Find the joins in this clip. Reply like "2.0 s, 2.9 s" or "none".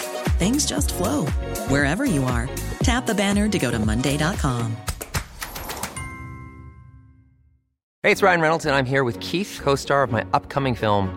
7.9 s